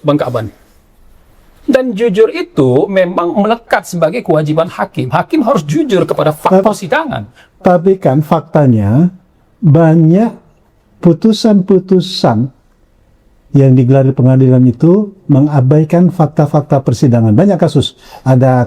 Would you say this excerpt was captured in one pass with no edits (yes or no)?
no